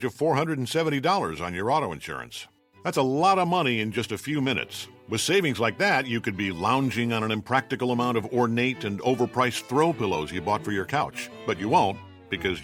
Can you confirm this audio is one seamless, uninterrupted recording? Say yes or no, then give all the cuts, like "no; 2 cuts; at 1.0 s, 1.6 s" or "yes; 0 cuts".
yes; 0 cuts